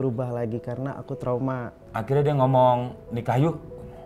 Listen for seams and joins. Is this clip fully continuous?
no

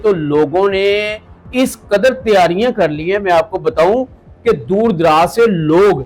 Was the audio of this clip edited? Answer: no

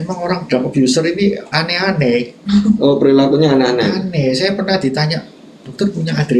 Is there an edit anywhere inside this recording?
no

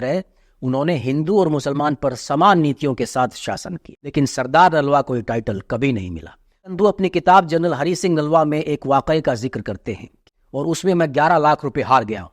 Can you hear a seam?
yes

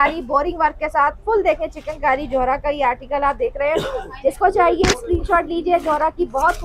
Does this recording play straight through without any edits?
yes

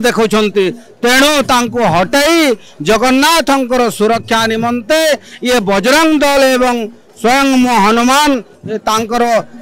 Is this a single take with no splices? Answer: yes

